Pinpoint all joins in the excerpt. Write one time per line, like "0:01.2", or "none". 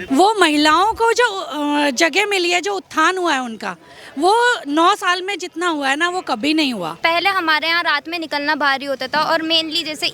0:07.0